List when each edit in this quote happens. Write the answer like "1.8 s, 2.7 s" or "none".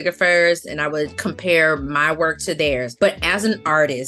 2.9 s